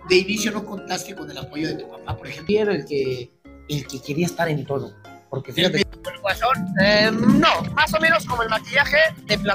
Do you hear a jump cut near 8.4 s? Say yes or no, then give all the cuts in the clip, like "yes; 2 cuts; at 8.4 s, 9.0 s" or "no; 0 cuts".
no; 2 cuts; at 2.5 s, 5.9 s